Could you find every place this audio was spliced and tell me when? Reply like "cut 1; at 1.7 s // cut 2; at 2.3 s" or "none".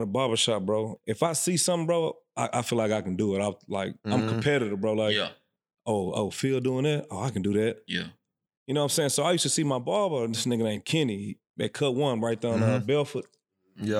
cut 1; at 0.9 s